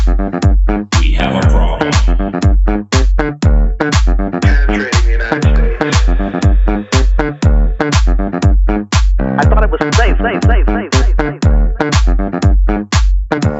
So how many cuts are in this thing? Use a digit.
1